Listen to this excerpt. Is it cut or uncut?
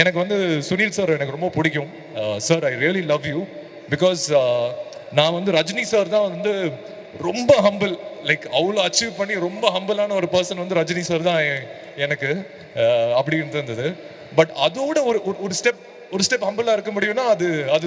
uncut